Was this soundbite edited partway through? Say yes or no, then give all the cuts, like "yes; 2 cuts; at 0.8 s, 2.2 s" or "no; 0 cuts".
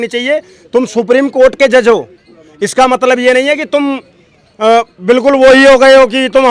no; 0 cuts